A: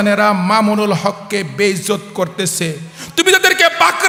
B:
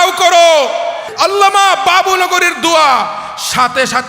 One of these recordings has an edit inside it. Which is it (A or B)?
B